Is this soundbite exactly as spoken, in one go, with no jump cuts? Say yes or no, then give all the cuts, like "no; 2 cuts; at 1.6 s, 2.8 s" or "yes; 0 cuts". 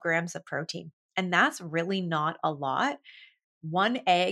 yes; 0 cuts